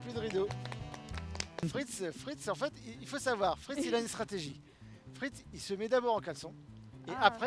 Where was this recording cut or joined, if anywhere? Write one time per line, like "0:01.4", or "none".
0:01.6